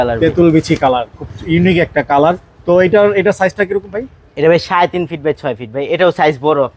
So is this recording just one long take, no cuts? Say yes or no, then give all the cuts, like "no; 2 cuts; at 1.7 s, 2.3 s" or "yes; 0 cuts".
yes; 0 cuts